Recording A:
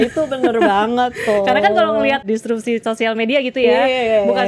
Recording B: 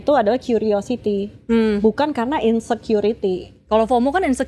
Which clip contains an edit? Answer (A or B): A